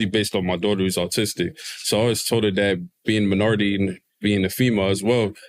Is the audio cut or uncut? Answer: uncut